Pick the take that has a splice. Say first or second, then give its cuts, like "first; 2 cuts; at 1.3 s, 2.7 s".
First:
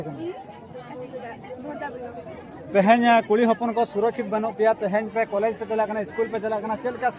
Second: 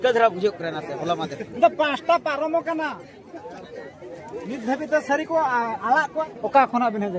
second; 1 cut; at 6.2 s